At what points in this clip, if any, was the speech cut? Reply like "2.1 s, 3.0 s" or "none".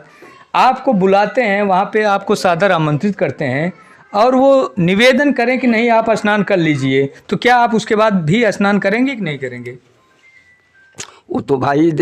none